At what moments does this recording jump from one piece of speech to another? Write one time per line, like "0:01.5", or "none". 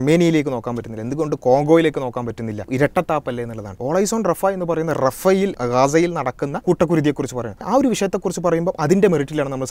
0:02.7
0:03.8
0:05.6
0:06.6
0:07.6